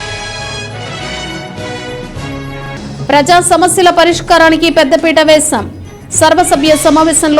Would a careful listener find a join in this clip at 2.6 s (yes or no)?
yes